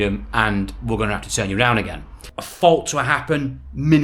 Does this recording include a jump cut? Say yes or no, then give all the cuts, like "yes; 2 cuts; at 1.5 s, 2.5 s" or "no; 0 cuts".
yes; 1 cut; at 2.2 s